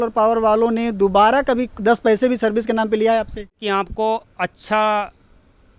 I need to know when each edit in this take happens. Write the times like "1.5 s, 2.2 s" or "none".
3.5 s